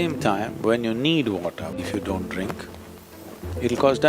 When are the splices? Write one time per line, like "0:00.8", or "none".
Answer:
0:01.8

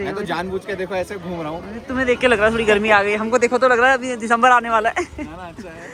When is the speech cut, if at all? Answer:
none

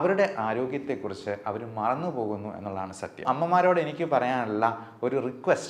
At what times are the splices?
0:03.2

